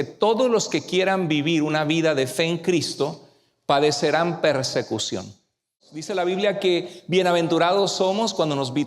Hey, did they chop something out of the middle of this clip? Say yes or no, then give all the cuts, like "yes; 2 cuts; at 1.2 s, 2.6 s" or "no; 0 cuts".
yes; 1 cut; at 5.9 s